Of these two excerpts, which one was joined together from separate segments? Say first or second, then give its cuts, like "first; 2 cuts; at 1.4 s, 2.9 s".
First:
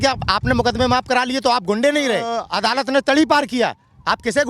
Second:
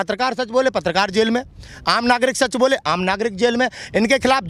first; 1 cut; at 2.4 s